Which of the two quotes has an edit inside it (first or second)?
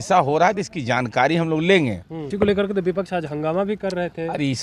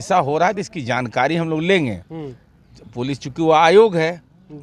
first